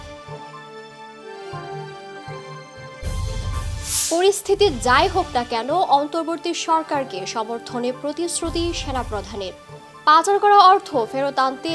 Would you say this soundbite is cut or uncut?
cut